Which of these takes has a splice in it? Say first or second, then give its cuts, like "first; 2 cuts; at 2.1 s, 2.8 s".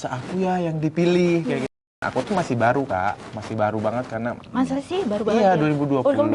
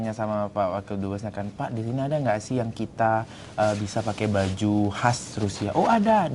first; 1 cut; at 1.9 s